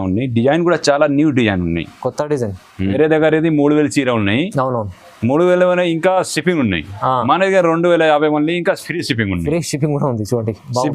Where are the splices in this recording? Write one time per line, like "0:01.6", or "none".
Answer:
0:02.9